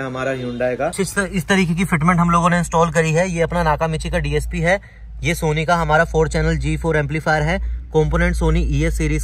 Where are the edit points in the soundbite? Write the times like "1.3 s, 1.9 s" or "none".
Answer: 0.9 s